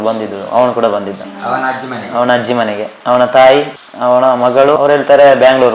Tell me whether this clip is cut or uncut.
cut